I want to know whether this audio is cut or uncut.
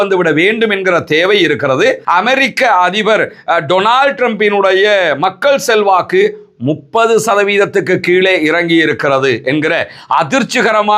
cut